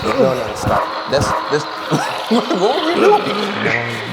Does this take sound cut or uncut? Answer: uncut